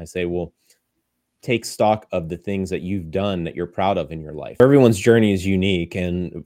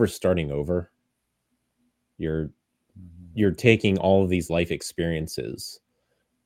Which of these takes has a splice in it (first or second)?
first